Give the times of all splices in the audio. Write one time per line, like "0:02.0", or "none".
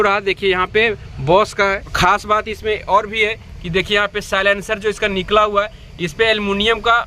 0:01.9